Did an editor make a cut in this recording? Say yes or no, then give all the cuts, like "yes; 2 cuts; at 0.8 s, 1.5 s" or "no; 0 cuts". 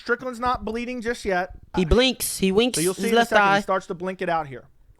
yes; 1 cut; at 1.7 s